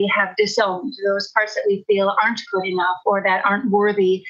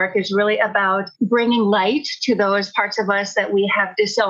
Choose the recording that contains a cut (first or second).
second